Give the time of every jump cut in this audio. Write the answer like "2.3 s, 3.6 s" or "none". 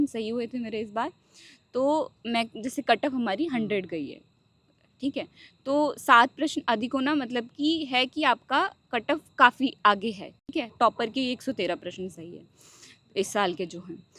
none

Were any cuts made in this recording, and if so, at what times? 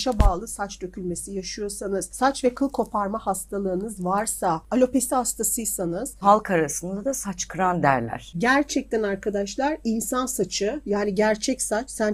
2.1 s, 4.6 s, 6.2 s, 8.4 s

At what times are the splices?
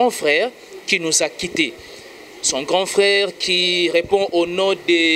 none

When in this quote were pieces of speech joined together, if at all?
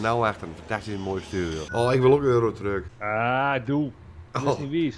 1.7 s, 2.9 s

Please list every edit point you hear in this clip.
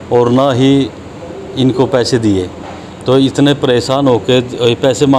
none

